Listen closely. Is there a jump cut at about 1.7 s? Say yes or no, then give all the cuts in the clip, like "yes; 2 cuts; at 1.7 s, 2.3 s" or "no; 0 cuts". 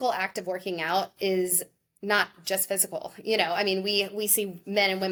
no; 0 cuts